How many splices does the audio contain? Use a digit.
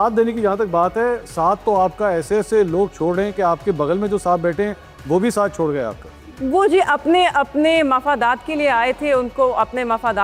0